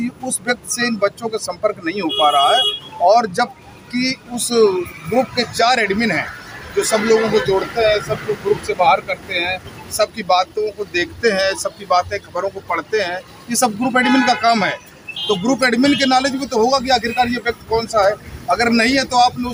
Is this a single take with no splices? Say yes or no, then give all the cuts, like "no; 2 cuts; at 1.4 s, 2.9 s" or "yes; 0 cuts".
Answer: yes; 0 cuts